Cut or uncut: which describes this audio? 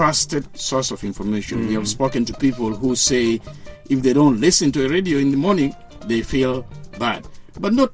uncut